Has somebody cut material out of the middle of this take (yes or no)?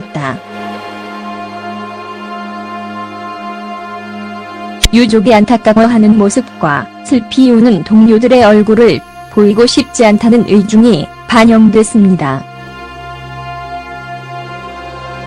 yes